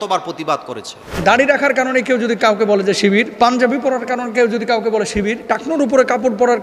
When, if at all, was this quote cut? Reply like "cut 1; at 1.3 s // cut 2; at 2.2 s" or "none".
cut 1; at 1.2 s // cut 2; at 3.3 s // cut 3; at 5.4 s

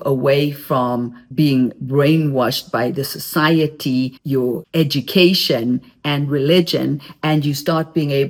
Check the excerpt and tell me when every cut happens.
none

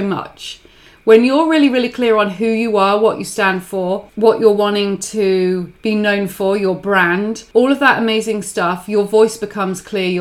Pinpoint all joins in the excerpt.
cut 1; at 4.1 s // cut 2; at 5.7 s // cut 3; at 7.4 s

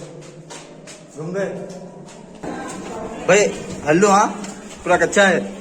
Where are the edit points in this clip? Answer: cut 1; at 2.4 s

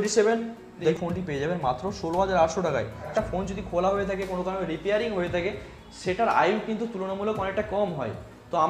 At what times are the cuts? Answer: cut 1; at 1.0 s // cut 2; at 3.0 s

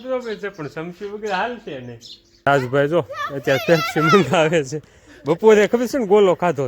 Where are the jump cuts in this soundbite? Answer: cut 1; at 2.5 s

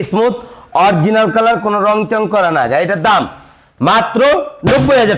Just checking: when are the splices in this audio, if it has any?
none

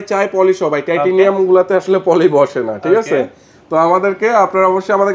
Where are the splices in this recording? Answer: none

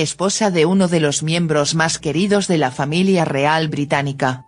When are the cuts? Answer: none

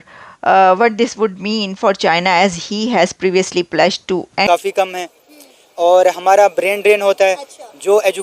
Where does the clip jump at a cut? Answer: cut 1; at 4.5 s

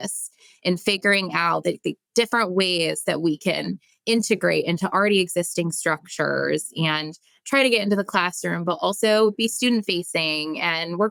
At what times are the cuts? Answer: none

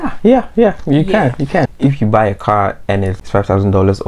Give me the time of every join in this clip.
cut 1; at 1.7 s // cut 2; at 3.2 s

